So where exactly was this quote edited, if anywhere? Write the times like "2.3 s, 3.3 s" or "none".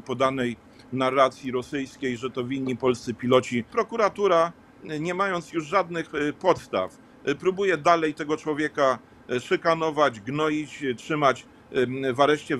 3.7 s